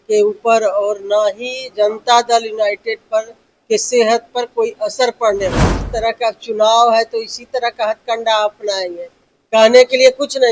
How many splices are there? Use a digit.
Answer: 1